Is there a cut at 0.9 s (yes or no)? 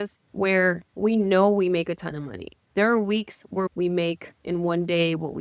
no